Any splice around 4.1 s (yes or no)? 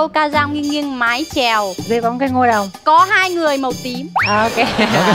yes